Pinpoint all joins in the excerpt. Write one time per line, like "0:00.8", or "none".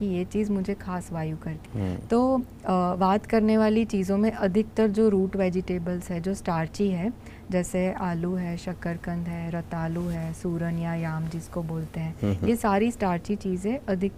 0:01.5